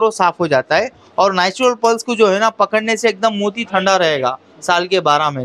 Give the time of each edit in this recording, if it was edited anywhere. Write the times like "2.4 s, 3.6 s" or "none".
none

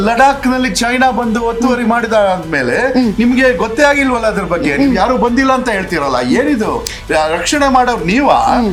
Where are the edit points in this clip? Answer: none

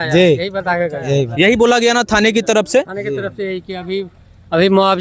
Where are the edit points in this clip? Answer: none

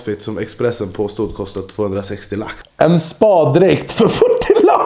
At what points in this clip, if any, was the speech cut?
2.6 s

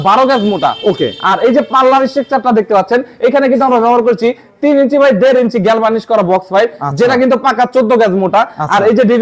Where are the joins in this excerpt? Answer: none

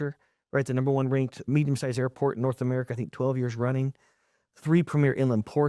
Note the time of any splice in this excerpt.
1.4 s

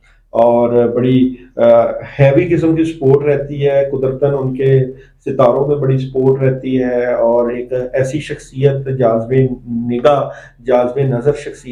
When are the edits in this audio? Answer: none

